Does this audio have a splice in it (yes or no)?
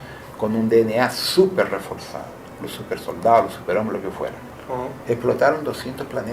yes